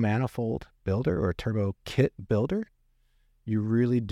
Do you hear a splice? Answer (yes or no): no